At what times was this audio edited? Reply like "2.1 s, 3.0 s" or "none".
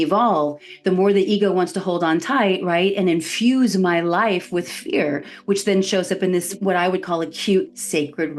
6.5 s